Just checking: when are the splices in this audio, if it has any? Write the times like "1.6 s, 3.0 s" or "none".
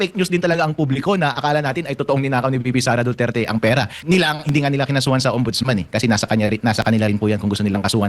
4.0 s